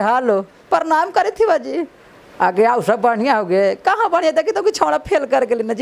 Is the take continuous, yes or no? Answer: yes